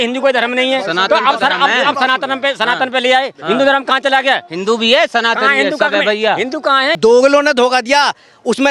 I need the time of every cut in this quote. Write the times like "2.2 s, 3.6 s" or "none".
7.0 s